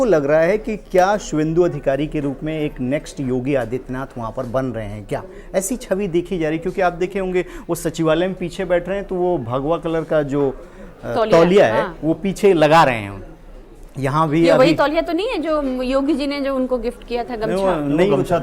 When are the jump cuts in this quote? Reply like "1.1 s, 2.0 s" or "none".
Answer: none

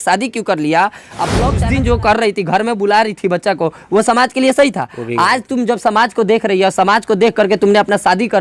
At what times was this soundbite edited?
1.6 s

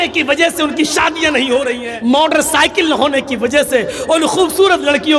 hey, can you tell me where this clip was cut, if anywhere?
1.8 s

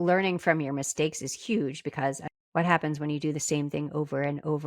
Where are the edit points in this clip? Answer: 2.2 s

